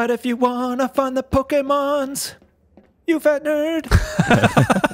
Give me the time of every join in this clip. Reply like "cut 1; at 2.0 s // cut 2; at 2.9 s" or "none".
cut 1; at 3.9 s